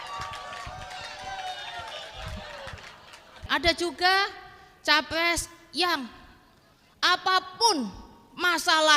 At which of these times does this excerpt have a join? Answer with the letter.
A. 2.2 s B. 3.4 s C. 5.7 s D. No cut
B